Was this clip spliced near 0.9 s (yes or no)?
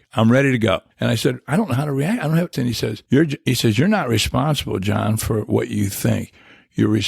yes